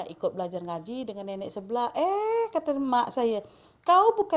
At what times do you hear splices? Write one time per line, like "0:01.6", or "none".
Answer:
none